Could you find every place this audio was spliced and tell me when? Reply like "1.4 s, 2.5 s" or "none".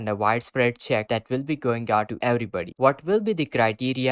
2.8 s